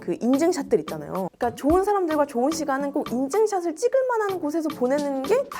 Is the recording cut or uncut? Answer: uncut